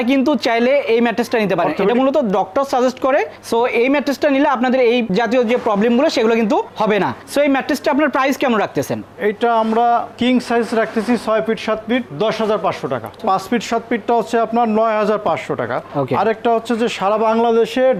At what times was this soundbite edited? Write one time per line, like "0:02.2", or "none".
none